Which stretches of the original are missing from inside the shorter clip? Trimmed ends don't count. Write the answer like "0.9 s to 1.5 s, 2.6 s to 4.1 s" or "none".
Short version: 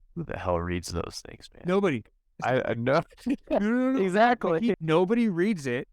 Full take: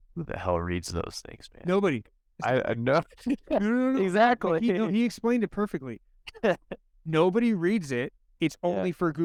4.8 s to 7.0 s